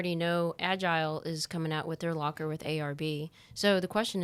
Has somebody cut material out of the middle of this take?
no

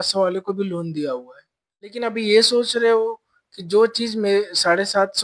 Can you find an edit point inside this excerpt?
yes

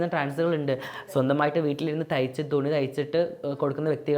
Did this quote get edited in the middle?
no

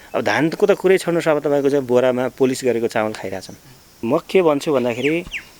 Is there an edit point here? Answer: yes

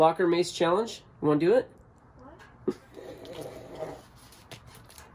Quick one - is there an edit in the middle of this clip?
no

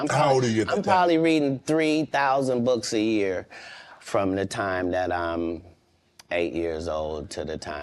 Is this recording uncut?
yes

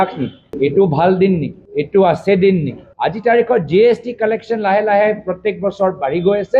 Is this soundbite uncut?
no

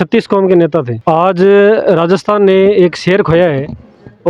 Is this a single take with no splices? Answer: no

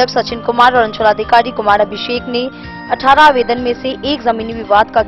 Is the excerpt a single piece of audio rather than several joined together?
yes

